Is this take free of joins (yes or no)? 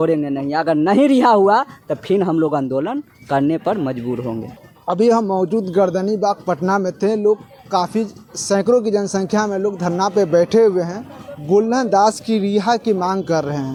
yes